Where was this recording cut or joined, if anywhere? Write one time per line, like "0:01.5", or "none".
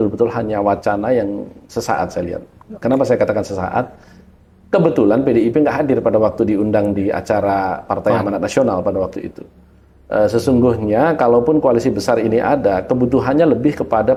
none